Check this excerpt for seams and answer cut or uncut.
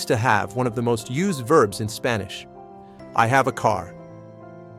cut